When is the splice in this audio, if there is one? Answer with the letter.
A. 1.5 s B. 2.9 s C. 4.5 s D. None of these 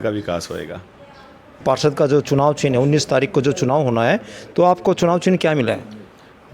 A